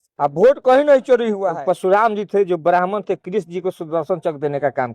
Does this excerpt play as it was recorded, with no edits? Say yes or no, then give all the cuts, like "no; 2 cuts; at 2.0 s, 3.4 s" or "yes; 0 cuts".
no; 1 cut; at 1.5 s